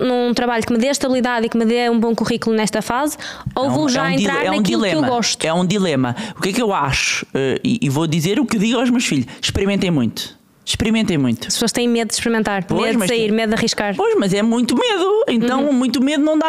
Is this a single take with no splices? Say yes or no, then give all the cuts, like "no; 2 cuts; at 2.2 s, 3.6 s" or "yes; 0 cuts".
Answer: yes; 0 cuts